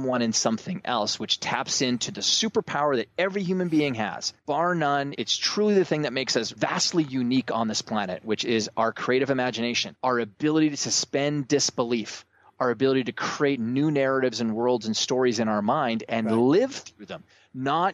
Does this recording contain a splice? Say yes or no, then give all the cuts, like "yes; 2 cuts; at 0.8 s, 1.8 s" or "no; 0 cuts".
yes; 4 cuts; at 4.3 s, 5.1 s, 6.5 s, 9.9 s